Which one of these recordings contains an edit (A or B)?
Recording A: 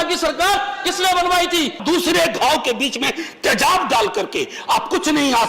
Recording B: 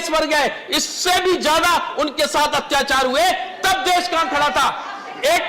A